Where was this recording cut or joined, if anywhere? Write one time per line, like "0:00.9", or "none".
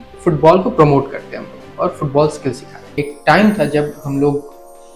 0:03.0